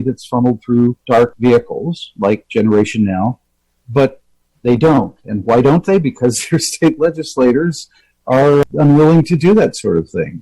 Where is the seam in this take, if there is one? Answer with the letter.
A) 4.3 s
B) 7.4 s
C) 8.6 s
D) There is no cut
C